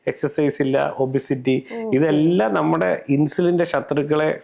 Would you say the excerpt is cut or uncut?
uncut